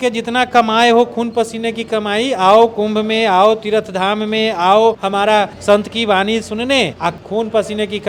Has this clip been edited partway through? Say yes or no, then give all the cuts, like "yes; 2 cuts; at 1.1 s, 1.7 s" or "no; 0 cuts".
no; 0 cuts